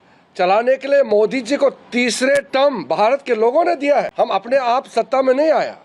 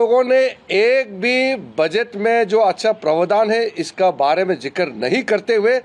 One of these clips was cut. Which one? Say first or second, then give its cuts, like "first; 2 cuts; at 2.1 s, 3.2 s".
first; 1 cut; at 4.1 s